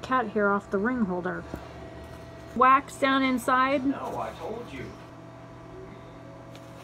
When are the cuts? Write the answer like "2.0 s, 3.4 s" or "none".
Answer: 5.0 s